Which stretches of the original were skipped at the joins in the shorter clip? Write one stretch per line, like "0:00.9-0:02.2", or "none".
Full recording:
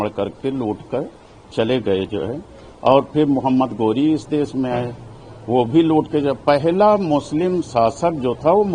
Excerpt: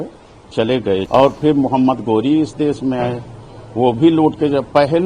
0:02.1-0:02.8

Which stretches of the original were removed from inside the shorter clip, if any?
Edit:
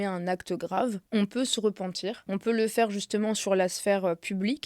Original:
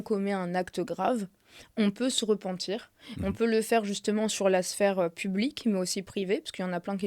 0:01.3-0:01.7
0:02.9-0:03.1

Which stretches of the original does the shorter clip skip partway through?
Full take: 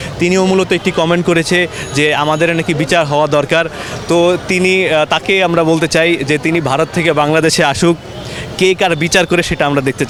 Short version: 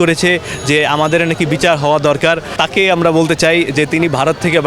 0:03.9-0:05.1

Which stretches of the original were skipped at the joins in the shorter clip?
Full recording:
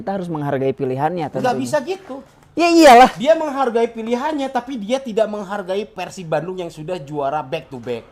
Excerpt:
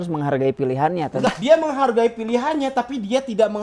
0:01.5-0:03.1

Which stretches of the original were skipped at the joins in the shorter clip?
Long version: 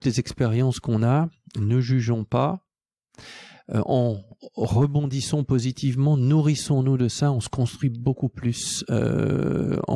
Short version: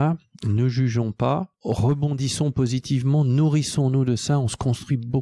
0:02.7-0:04.5

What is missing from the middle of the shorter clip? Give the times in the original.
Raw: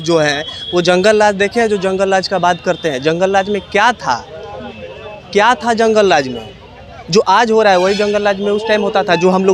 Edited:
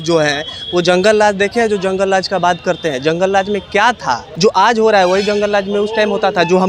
0:04.3-0:07.0

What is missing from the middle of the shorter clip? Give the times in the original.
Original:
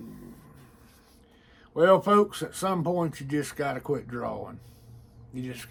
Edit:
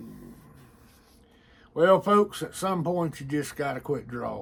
none

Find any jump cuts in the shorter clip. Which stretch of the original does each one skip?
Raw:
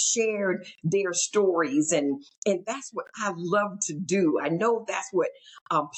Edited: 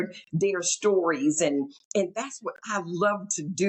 none

